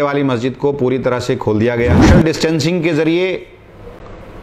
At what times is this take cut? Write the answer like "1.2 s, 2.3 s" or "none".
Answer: 2.0 s